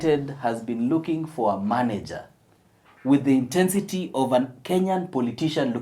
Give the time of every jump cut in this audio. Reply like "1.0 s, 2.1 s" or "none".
none